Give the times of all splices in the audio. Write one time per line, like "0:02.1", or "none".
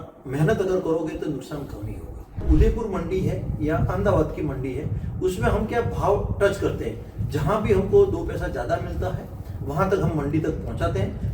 0:02.4